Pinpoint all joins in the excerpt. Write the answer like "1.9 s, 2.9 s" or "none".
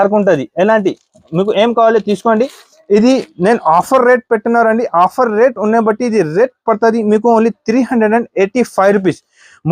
none